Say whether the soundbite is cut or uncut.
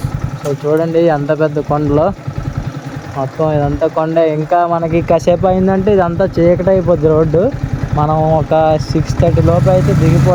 uncut